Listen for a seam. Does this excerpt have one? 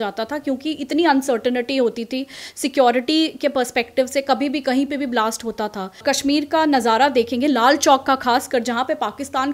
yes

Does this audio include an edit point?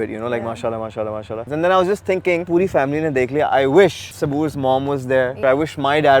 yes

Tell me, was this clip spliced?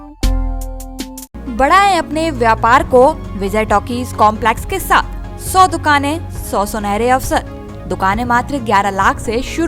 no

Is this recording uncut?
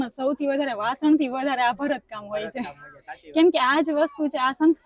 yes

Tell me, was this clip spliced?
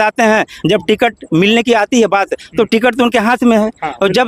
no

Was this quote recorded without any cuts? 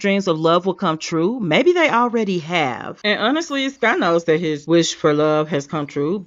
yes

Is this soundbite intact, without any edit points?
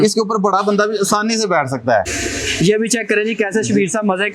no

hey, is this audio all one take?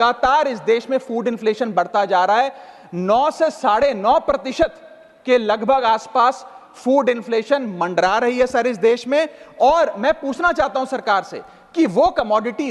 yes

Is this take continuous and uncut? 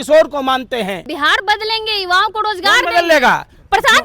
no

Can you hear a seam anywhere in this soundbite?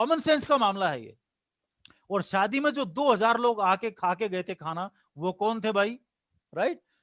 no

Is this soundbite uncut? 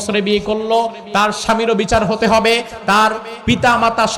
yes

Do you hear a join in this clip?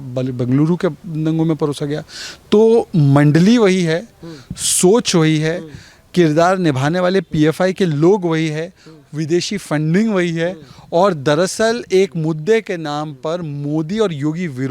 no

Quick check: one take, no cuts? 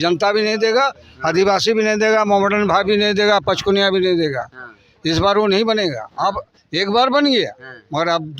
yes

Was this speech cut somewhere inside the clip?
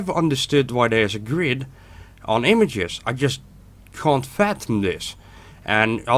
yes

